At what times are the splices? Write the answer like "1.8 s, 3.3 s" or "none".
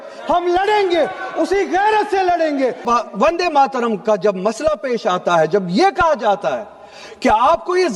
2.8 s